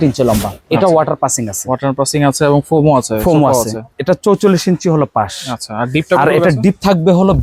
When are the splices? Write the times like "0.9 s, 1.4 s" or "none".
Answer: none